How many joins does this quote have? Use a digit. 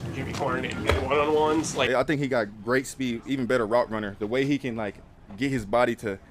1